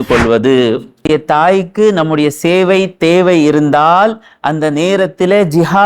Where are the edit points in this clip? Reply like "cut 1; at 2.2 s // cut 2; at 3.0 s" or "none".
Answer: cut 1; at 1.1 s